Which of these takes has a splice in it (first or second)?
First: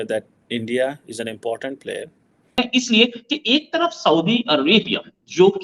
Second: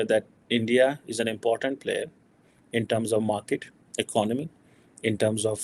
first